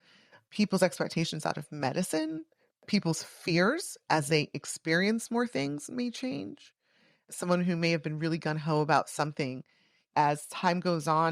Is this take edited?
yes; 1 cut; at 2.8 s

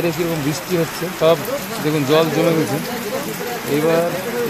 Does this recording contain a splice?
yes; 1 cut; at 1.1 s

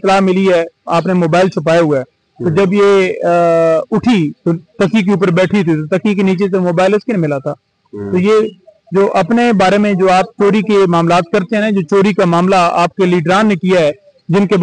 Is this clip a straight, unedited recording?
yes; 0 cuts

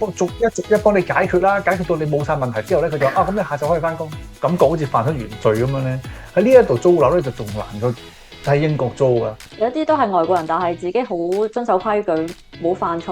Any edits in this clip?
yes; 2 cuts; at 4.2 s, 9.4 s

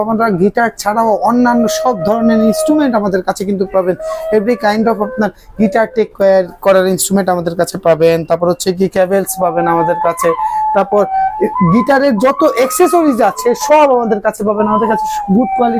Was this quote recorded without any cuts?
yes; 0 cuts

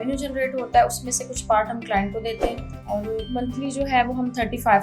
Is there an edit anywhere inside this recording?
yes; 1 cut; at 2.7 s

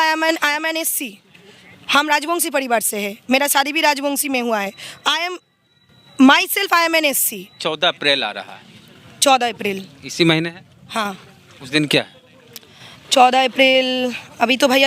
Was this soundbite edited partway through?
yes; 1 cut; at 7.6 s

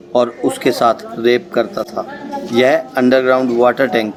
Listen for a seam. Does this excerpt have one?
no; 0 cuts

